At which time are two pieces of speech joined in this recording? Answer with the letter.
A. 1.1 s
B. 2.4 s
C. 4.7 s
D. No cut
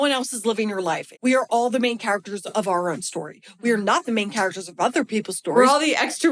A